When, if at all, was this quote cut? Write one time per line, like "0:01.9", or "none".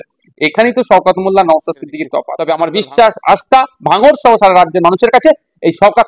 0:02.3